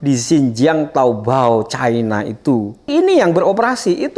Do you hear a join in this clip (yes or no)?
yes